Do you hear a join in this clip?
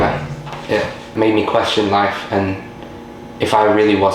yes; 1 cut; at 1.1 s

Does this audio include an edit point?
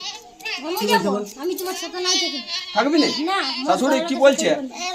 no; 0 cuts

